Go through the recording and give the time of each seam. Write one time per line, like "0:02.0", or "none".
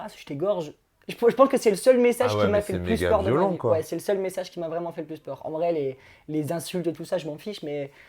none